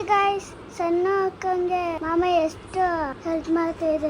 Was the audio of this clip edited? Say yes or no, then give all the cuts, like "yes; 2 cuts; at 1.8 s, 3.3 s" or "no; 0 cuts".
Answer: yes; 2 cuts; at 2.0 s, 3.2 s